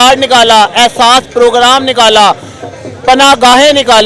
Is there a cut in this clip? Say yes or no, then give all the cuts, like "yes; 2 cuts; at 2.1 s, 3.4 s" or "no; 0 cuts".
no; 0 cuts